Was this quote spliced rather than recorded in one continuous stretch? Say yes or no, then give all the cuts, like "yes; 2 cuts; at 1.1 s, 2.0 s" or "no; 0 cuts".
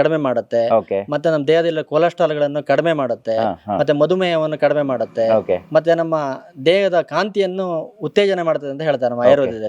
no; 0 cuts